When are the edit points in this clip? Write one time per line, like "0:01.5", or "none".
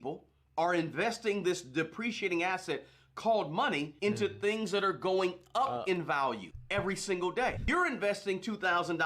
0:07.6